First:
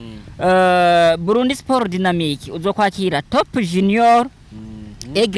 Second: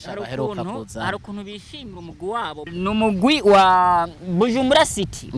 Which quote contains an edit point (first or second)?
second